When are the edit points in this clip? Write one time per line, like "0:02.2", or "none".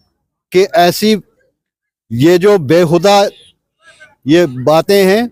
none